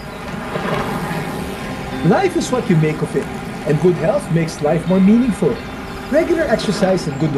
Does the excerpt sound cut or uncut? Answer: uncut